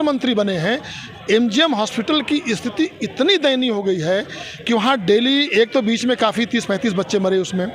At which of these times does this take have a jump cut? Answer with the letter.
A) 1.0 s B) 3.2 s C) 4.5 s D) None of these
D